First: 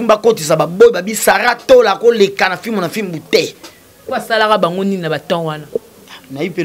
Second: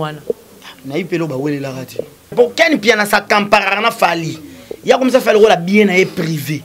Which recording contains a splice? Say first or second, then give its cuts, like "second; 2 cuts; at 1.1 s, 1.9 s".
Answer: second; 1 cut; at 2.3 s